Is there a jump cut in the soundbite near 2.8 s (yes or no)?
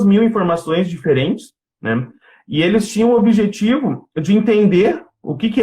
no